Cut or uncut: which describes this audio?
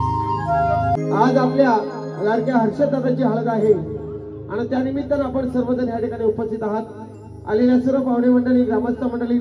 cut